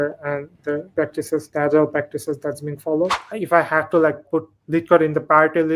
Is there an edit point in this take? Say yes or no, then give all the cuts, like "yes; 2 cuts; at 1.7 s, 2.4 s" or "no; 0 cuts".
yes; 3 cuts; at 1.1 s, 3.3 s, 4.2 s